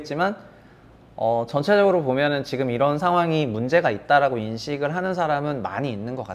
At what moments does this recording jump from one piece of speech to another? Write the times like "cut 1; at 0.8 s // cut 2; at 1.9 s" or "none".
none